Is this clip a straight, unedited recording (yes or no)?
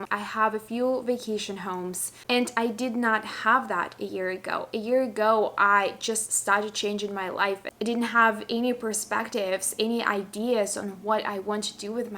no